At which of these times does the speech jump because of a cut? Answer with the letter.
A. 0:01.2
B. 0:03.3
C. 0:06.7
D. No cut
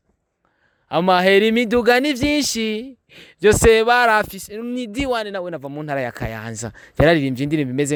D